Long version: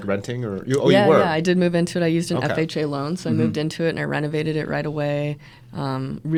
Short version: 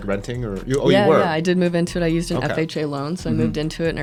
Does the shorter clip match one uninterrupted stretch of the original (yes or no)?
yes